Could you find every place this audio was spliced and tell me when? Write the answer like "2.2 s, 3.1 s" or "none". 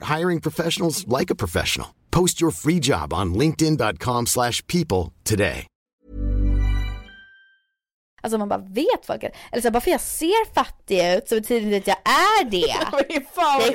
8.1 s